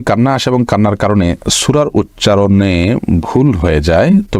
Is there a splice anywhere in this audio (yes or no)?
no